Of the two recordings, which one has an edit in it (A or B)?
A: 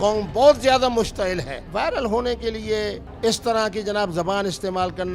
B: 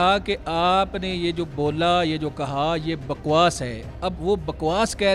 A